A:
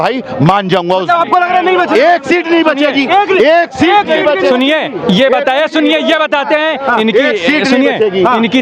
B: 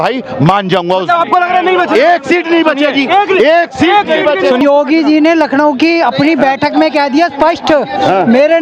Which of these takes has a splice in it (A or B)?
B